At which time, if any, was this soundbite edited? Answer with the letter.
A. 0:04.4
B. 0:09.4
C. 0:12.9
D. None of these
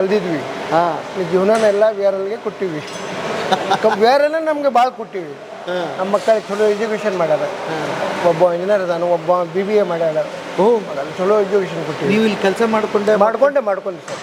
D